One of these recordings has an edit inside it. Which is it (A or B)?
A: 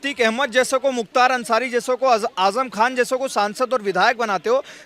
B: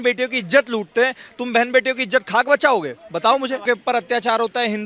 B